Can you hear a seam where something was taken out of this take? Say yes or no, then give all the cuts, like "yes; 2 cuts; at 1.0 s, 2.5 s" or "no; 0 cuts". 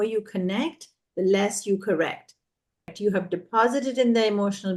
yes; 1 cut; at 2.9 s